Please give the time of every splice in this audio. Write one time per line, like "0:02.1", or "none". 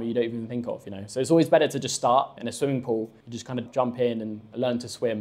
0:02.4
0:03.7